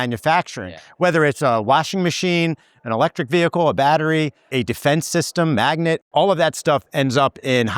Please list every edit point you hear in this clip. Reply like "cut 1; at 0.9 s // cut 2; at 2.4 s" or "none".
cut 1; at 4.5 s // cut 2; at 6.0 s